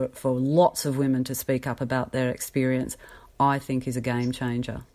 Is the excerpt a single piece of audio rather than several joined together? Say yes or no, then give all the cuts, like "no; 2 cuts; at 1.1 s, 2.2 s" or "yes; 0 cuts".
yes; 0 cuts